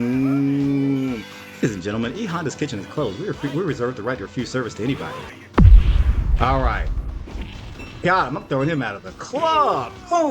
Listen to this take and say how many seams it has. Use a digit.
1